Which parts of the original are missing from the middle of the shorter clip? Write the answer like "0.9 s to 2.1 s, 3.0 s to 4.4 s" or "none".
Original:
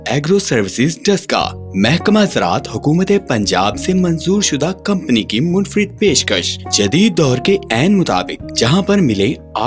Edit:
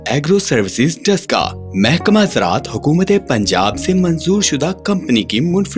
none